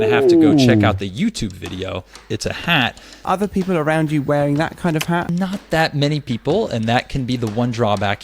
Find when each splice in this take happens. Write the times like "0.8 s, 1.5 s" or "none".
2.2 s, 3.2 s, 5.3 s